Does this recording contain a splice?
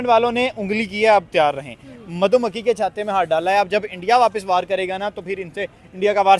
no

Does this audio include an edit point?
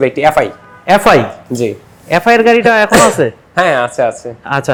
no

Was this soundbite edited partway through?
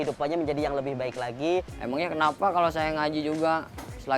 yes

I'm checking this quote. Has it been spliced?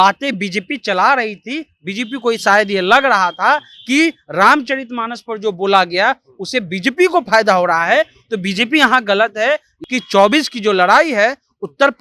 yes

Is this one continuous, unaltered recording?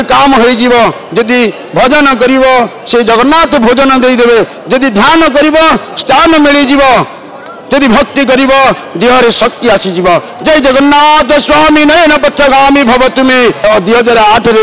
no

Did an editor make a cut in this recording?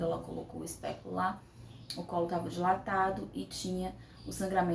no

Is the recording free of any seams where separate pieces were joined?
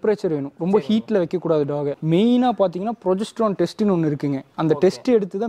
no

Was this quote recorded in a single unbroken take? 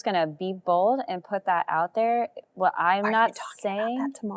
yes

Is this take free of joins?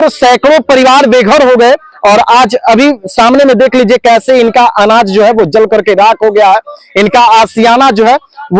yes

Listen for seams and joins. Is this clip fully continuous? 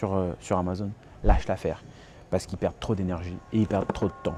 yes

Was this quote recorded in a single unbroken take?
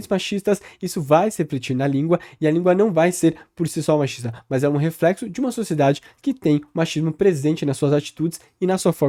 yes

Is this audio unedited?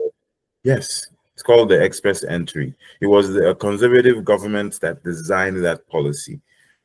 yes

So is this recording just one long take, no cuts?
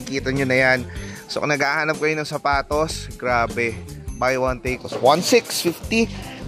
no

